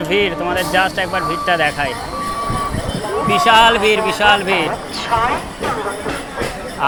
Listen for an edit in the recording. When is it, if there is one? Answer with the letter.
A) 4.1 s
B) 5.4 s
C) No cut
C